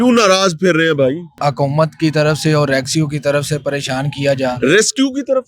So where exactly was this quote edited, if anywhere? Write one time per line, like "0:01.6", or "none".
0:01.3